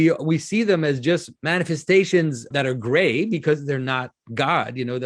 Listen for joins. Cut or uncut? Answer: cut